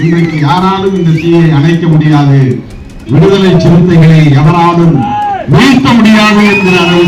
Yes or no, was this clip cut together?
no